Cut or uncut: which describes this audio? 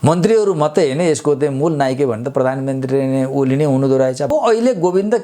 cut